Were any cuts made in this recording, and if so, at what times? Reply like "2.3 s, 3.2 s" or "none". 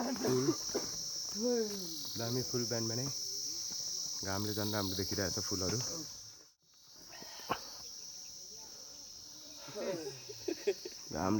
6.6 s